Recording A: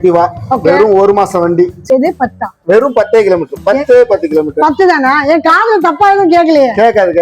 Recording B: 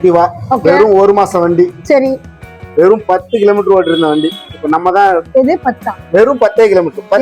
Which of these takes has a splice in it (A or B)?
A